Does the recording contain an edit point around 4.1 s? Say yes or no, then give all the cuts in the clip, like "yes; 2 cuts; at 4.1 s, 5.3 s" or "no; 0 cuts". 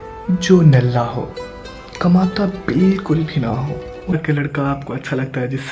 yes; 1 cut; at 4.1 s